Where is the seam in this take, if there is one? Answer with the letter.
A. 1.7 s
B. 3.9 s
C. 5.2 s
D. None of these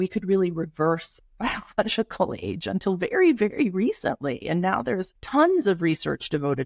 C